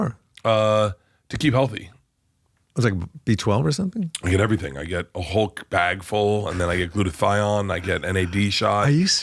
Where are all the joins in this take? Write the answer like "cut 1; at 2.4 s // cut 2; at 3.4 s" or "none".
none